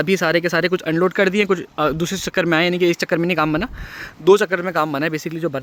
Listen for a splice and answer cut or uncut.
uncut